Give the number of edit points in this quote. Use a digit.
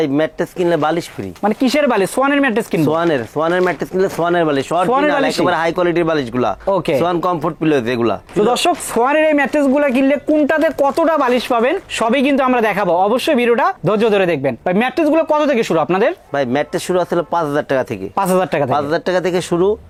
0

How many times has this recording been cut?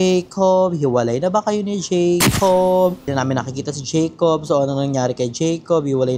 1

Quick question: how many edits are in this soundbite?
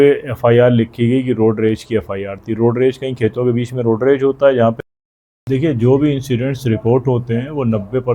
1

